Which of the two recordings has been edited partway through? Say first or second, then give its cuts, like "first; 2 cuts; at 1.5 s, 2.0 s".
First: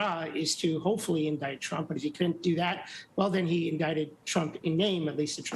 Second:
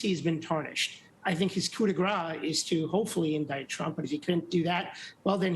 second; 1 cut; at 1.0 s